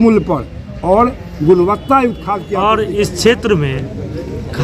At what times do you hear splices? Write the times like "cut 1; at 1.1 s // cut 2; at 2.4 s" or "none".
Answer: cut 1; at 2.5 s